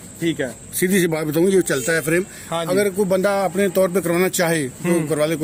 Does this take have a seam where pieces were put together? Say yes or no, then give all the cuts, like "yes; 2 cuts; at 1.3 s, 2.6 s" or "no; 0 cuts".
no; 0 cuts